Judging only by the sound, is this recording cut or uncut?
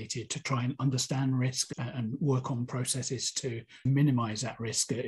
cut